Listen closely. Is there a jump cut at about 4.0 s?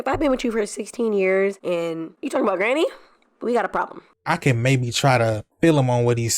yes; 1 cut; at 4.0 s

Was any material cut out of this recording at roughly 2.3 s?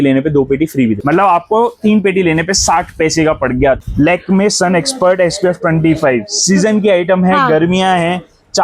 no; 2 cuts; at 1.0 s, 3.8 s

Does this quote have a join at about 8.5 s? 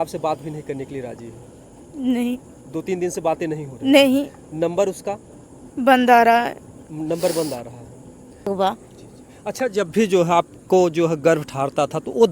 yes; 1 cut; at 8.5 s

